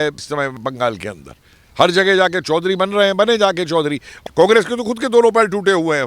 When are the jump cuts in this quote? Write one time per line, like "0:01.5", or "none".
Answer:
0:04.2